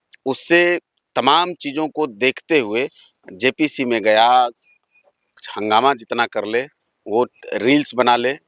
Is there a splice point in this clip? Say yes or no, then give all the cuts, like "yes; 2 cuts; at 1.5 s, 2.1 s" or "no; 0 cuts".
yes; 1 cut; at 5.5 s